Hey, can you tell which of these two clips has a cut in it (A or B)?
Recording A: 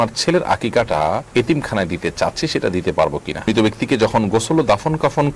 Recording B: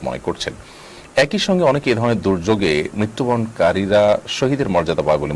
A